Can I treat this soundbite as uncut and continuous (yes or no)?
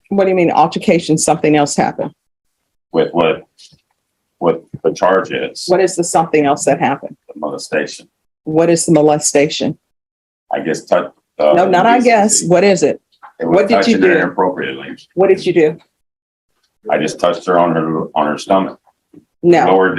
yes